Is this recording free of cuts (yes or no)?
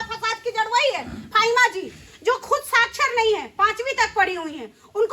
yes